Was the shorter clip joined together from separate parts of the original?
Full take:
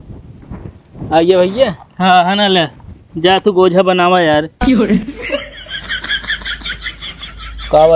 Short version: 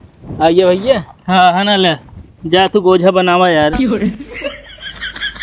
yes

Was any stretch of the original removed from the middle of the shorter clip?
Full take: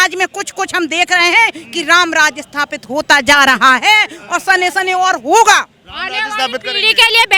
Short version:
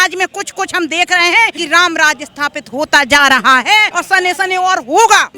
yes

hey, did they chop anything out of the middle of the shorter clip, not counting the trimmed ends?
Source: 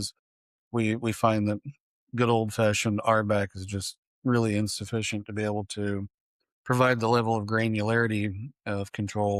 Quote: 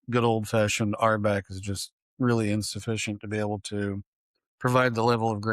no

